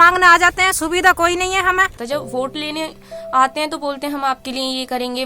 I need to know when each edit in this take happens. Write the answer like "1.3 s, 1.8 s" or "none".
2.0 s